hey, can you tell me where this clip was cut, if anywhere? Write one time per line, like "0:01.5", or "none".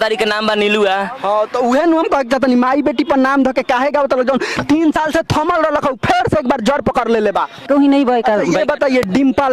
0:07.6